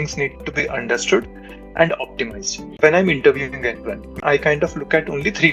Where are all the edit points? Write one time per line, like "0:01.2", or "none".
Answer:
0:02.8
0:04.1